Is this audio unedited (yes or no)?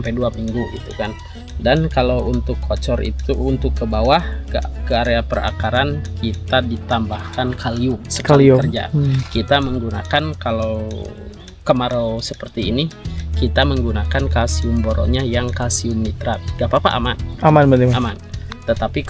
yes